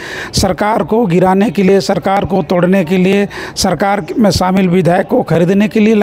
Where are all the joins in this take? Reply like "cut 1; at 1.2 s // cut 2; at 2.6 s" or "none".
none

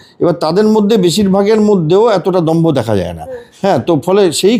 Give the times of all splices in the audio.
none

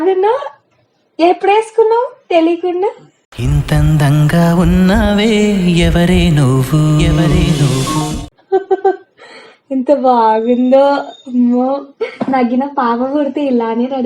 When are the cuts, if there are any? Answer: cut 1; at 8.3 s

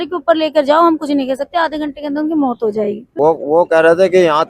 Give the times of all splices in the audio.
cut 1; at 3.0 s

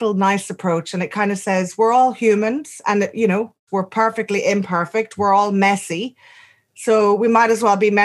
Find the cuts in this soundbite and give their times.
cut 1; at 3.6 s

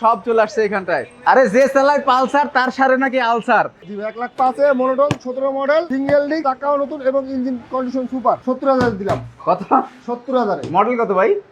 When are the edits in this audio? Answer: cut 1; at 1.1 s // cut 2; at 3.8 s // cut 3; at 8.4 s

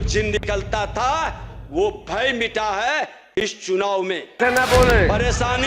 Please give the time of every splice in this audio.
cut 1; at 4.4 s

